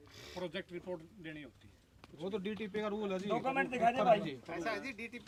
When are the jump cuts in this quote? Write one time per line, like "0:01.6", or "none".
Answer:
none